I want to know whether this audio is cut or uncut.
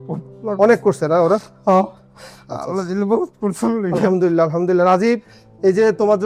uncut